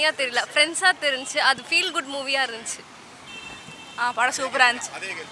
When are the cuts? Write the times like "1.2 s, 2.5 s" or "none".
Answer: none